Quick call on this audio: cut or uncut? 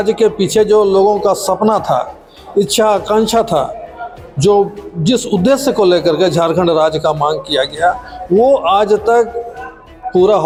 uncut